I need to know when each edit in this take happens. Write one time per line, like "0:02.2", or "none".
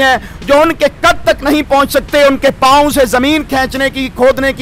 none